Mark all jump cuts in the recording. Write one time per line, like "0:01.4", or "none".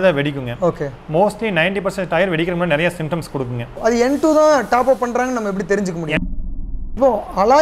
0:03.6
0:06.3